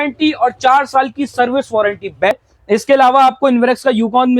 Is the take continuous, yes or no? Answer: no